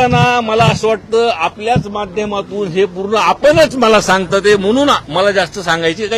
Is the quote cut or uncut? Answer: uncut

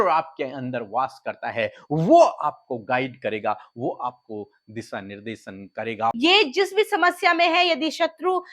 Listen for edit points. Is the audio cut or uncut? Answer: cut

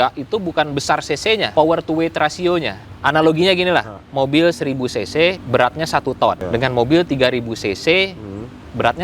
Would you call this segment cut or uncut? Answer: cut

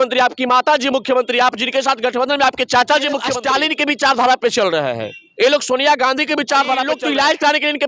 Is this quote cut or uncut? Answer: cut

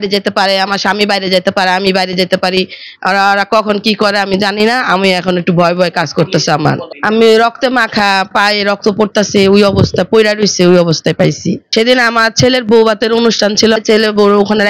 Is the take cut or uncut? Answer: cut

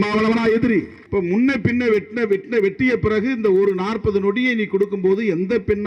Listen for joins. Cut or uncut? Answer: cut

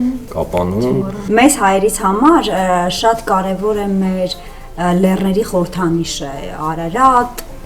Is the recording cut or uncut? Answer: cut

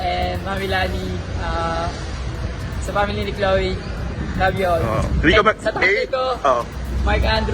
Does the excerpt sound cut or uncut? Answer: uncut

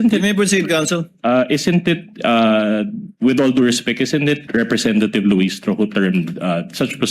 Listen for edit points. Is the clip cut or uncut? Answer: cut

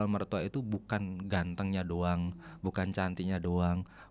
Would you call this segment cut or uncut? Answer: uncut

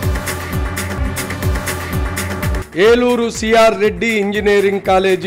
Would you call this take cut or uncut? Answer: cut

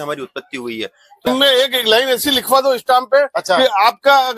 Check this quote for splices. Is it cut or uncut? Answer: cut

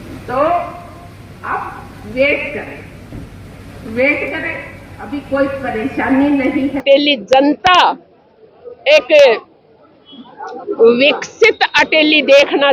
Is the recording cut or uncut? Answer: cut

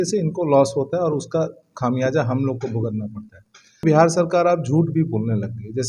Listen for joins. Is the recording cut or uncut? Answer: cut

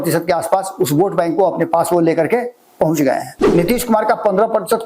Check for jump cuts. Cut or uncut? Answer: cut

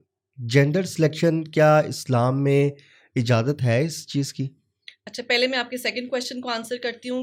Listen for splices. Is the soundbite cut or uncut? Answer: uncut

